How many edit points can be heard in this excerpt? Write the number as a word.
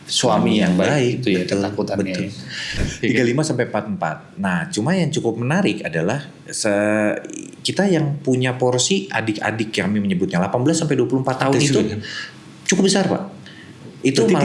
one